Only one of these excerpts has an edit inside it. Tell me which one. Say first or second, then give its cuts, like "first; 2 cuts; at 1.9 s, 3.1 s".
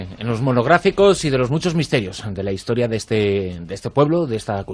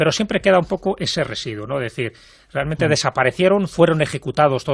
second; 1 cut; at 3.5 s